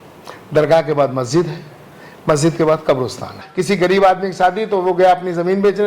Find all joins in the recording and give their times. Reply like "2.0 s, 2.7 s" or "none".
3.4 s